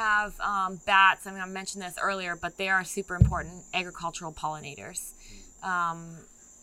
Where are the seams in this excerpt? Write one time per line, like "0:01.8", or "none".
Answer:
none